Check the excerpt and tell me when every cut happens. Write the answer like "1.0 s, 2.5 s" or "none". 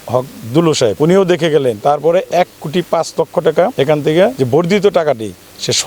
0.9 s, 4.1 s